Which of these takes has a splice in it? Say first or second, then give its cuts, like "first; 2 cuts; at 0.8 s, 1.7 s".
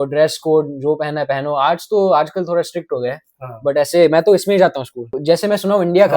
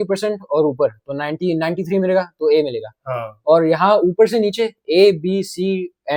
first; 1 cut; at 5.2 s